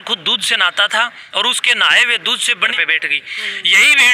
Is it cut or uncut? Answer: cut